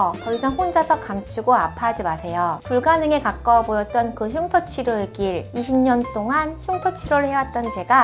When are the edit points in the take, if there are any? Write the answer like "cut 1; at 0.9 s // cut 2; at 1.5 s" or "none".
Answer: none